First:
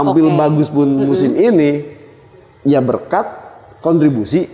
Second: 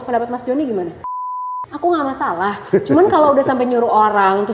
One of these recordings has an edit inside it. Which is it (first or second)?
second